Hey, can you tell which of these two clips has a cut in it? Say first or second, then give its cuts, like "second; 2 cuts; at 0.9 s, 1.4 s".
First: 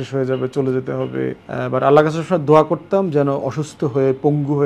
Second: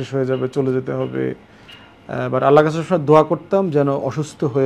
first; 1 cut; at 1.4 s